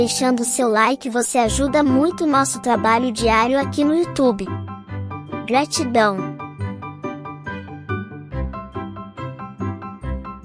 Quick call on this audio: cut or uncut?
cut